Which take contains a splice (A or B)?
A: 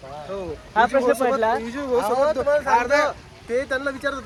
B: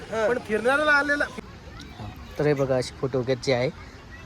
B